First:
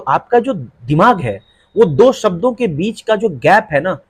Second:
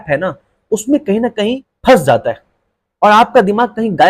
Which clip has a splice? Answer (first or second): second